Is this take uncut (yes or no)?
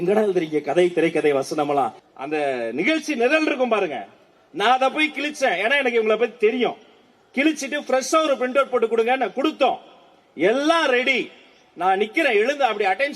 no